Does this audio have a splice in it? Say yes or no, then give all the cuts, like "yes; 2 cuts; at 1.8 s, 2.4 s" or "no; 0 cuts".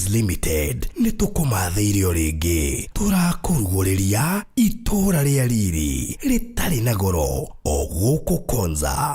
yes; 1 cut; at 5.1 s